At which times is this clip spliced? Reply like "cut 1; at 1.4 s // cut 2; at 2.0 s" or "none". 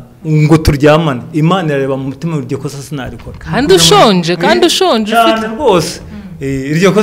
none